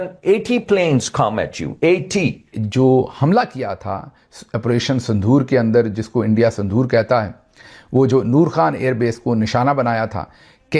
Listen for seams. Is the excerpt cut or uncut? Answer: cut